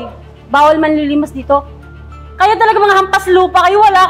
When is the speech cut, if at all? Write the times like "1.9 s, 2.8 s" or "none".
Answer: 1.8 s